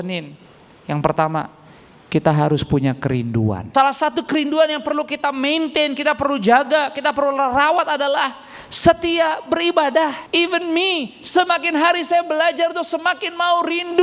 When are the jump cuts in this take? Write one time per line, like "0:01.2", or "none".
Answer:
0:03.6
0:10.2